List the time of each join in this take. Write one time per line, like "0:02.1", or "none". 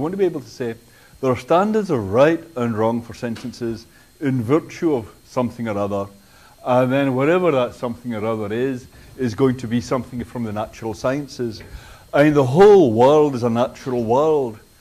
0:05.6